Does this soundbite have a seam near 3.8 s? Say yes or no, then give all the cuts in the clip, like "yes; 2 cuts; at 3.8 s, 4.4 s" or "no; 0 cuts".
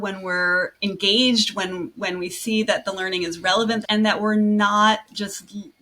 yes; 1 cut; at 3.8 s